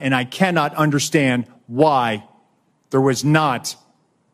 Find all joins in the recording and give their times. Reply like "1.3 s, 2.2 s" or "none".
none